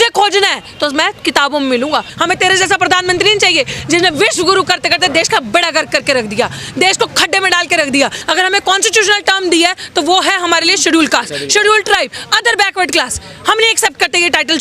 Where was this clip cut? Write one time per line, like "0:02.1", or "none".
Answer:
0:02.1
0:08.2